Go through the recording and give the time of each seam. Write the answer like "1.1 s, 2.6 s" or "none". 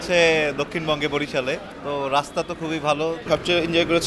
1.7 s, 3.2 s